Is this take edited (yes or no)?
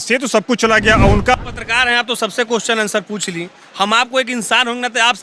yes